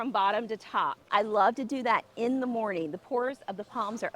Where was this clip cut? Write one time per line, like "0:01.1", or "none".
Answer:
0:01.1